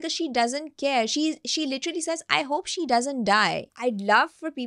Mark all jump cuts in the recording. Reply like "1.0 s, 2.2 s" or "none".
3.7 s

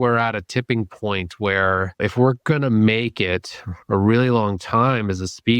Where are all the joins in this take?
2.0 s

